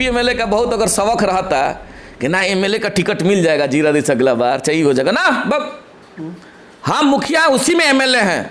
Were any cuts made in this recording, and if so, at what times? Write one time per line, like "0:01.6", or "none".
none